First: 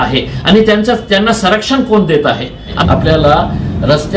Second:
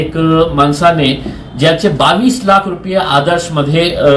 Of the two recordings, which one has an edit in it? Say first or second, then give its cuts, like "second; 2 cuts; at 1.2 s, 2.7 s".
first; 1 cut; at 2.8 s